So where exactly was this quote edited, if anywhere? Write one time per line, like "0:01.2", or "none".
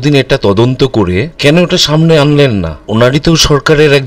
0:01.3
0:02.8